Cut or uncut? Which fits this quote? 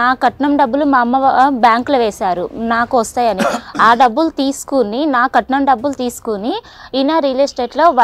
uncut